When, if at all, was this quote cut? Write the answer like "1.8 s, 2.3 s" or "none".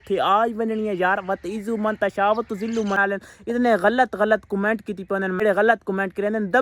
3.0 s, 5.4 s

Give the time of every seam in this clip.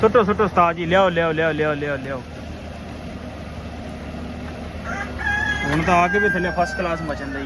none

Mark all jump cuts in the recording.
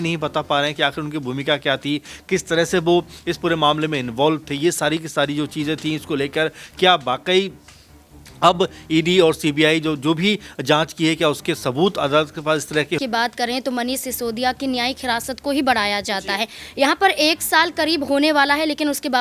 13.0 s

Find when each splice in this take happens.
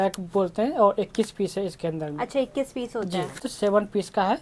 3.5 s

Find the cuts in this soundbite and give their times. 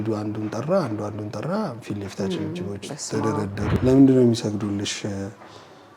3.8 s

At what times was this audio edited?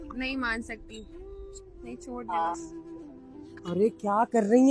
none

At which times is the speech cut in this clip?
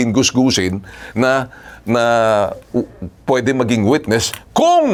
none

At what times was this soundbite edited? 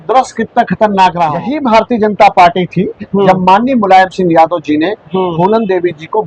1.5 s

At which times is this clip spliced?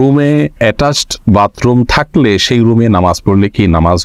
none

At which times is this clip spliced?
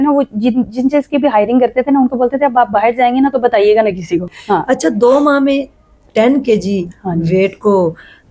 4.3 s

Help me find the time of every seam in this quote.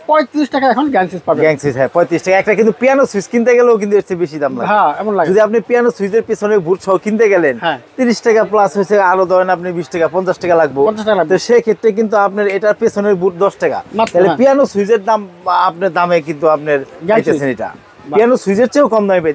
none

